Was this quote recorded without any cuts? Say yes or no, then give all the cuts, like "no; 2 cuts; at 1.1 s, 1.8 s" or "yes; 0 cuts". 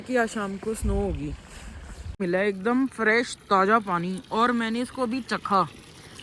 no; 1 cut; at 2.2 s